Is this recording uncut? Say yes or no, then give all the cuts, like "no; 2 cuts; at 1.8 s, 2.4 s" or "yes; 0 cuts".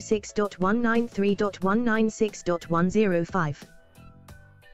yes; 0 cuts